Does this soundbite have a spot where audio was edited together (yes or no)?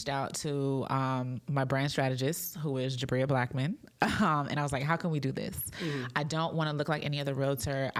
no